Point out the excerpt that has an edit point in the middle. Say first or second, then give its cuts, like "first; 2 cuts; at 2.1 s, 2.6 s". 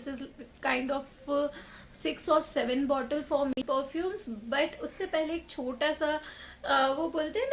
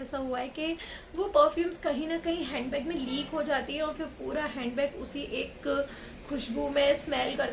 first; 1 cut; at 3.5 s